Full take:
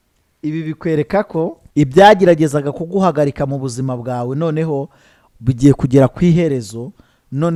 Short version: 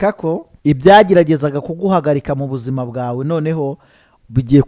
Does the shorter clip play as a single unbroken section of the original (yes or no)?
yes